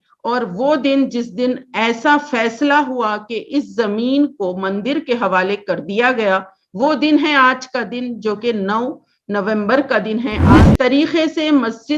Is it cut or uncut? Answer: cut